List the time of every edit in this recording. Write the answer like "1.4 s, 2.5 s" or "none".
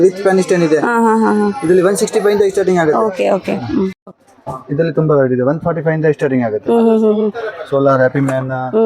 4.1 s